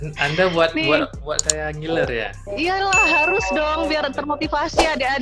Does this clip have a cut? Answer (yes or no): no